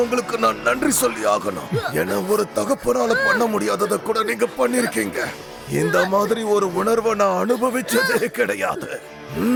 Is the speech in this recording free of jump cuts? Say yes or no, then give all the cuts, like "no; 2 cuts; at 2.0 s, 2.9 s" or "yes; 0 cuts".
yes; 0 cuts